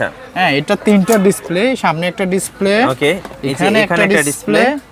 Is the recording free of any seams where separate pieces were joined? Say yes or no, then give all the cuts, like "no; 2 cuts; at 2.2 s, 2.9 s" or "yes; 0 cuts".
yes; 0 cuts